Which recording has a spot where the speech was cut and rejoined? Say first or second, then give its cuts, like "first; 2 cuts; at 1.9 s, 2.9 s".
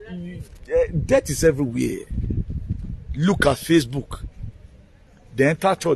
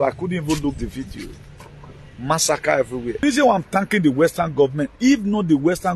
second; 1 cut; at 3.2 s